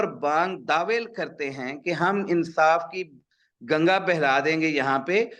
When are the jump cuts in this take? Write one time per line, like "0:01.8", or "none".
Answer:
none